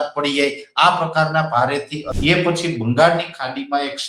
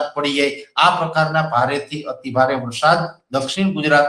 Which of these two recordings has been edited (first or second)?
first